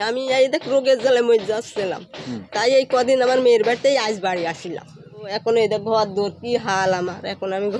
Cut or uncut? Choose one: cut